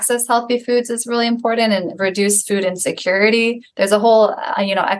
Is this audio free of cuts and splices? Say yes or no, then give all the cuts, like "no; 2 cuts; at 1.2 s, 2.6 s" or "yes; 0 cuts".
yes; 0 cuts